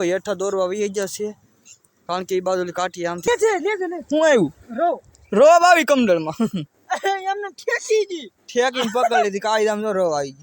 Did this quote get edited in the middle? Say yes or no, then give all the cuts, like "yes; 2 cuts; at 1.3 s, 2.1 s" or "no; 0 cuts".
yes; 1 cut; at 3.3 s